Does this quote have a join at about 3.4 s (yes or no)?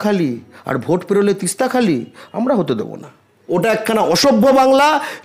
yes